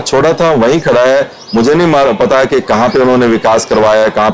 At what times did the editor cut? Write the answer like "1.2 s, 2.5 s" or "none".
none

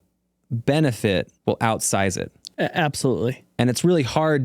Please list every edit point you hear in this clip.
1.3 s, 2.4 s, 3.4 s

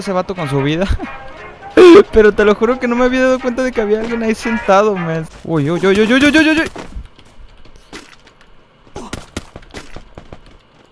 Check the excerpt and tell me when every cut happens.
5.3 s

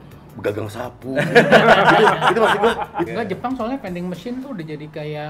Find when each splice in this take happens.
3.1 s

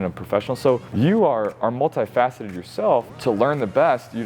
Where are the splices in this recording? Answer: 0.9 s, 3.1 s

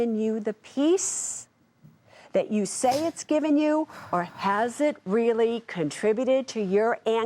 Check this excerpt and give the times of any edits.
none

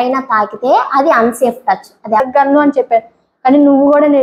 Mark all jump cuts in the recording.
2.2 s

